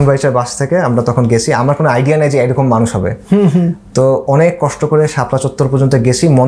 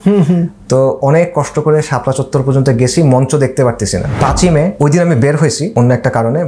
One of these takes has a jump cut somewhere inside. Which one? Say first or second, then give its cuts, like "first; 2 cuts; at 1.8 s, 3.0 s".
second; 2 cuts; at 4.4 s, 5.6 s